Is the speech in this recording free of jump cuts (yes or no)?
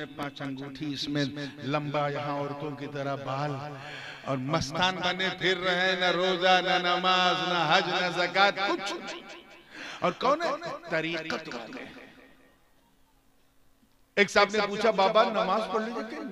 yes